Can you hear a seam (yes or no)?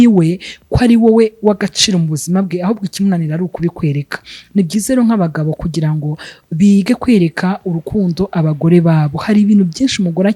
no